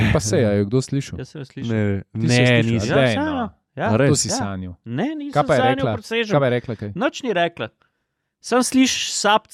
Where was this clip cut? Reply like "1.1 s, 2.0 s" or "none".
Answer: none